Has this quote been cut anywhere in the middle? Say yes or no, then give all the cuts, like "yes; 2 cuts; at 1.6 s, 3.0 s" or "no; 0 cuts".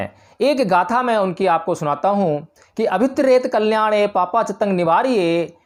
no; 0 cuts